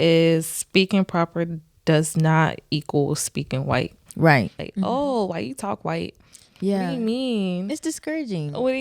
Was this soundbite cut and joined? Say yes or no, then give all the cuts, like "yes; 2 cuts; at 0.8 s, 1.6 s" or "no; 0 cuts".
yes; 1 cut; at 4.6 s